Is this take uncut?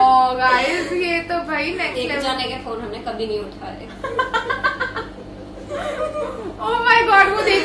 yes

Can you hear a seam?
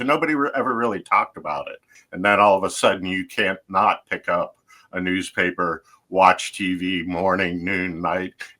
yes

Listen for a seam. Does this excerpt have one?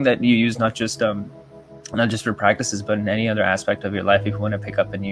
no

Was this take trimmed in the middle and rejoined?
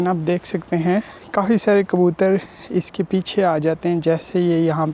yes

